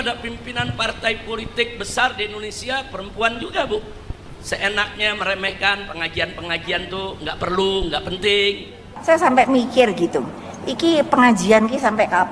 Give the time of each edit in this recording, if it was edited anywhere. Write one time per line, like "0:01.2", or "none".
0:08.9